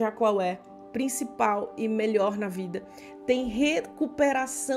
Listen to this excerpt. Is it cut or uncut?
uncut